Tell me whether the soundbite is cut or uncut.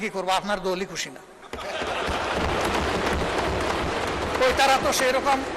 uncut